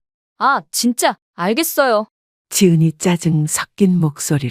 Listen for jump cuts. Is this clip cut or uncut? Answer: cut